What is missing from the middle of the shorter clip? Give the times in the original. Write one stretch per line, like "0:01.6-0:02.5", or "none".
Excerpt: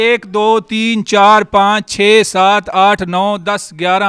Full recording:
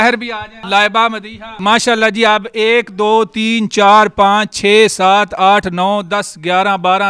none